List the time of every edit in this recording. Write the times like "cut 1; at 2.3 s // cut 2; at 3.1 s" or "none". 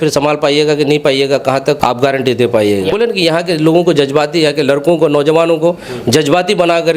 cut 1; at 1.8 s // cut 2; at 2.9 s